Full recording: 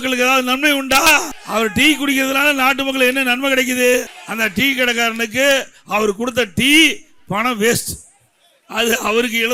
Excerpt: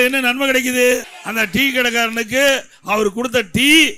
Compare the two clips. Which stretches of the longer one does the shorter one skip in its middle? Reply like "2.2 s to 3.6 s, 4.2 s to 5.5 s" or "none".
none